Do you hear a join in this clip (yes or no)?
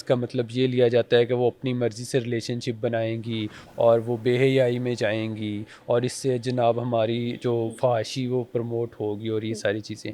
no